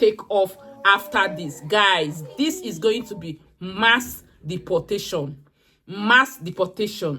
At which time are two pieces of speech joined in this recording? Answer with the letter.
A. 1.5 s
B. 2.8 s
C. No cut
C